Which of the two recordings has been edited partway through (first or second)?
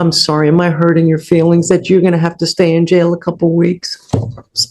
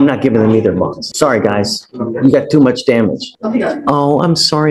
second